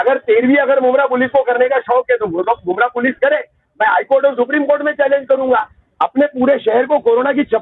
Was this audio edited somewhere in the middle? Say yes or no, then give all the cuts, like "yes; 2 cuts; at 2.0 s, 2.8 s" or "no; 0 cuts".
yes; 1 cut; at 5.8 s